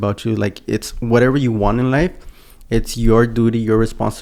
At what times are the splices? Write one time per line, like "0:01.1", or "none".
none